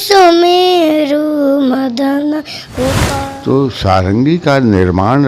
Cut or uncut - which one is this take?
cut